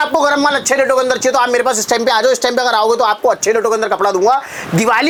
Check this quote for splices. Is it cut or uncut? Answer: uncut